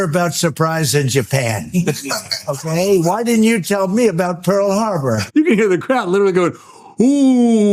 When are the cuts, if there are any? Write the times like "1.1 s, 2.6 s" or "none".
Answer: 5.2 s